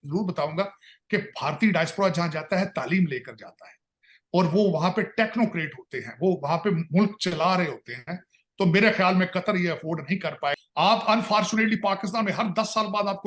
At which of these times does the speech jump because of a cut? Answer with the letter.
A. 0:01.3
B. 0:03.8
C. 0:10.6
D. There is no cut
C